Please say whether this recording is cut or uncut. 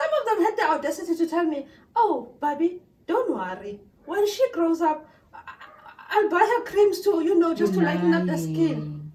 uncut